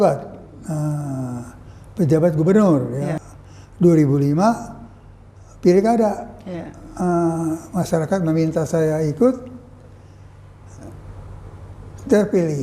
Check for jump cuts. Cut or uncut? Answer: cut